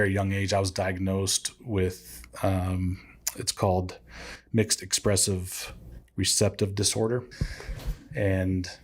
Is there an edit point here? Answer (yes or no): yes